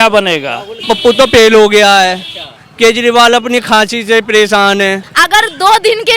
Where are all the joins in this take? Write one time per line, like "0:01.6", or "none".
0:00.8
0:05.0